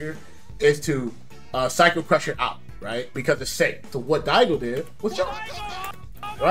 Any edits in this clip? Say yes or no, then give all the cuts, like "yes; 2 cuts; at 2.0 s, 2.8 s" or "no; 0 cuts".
yes; 1 cut; at 3.8 s